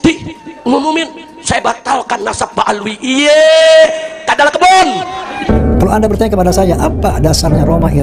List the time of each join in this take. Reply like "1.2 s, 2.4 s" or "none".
5.3 s